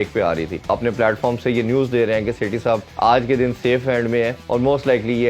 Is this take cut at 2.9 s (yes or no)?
yes